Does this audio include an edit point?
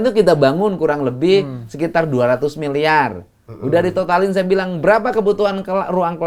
no; 0 cuts

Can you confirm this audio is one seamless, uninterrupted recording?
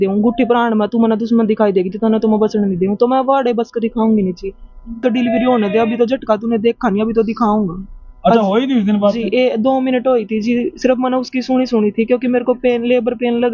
no; 1 cut; at 5.0 s

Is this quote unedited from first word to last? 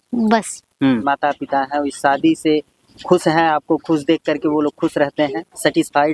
no; 1 cut; at 1.0 s

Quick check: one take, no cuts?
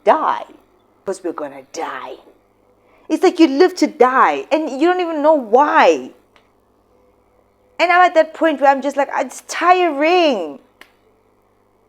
no; 1 cut; at 1.0 s

